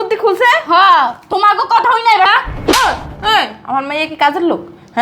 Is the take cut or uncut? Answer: cut